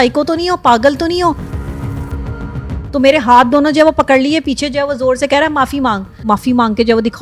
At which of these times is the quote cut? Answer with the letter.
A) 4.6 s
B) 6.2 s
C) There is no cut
B